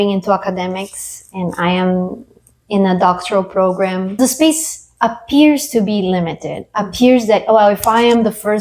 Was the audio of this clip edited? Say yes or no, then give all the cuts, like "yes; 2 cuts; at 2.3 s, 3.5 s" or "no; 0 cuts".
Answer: yes; 1 cut; at 4.2 s